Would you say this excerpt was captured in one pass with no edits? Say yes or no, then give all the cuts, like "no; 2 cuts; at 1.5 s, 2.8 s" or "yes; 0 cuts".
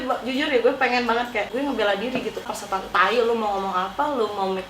no; 2 cuts; at 1.5 s, 2.5 s